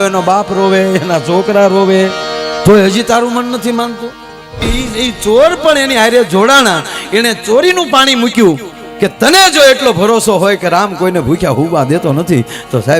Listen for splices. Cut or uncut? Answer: cut